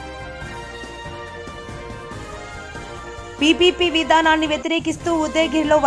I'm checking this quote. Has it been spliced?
no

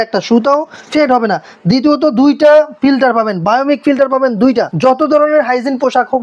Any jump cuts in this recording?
yes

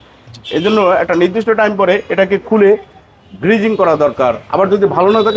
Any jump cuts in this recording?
no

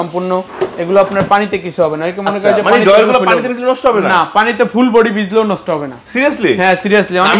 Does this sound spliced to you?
no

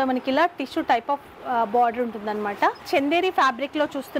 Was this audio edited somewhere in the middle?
yes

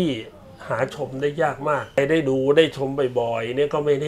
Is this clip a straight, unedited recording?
no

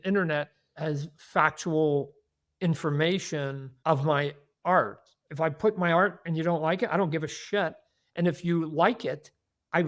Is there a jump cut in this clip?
yes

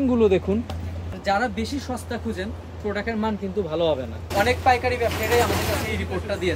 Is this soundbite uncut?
no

